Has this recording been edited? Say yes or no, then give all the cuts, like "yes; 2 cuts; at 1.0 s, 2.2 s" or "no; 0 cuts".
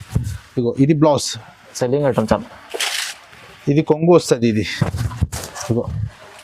yes; 1 cut; at 1.7 s